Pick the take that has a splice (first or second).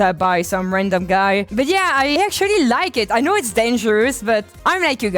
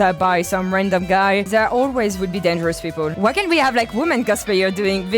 second